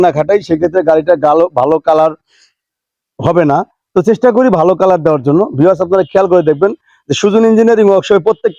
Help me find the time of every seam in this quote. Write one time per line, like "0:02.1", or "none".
none